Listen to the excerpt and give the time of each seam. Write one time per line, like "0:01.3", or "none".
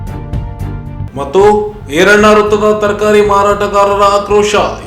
0:00.9